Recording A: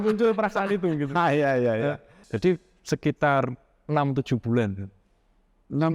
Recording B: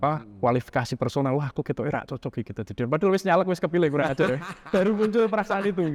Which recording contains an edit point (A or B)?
A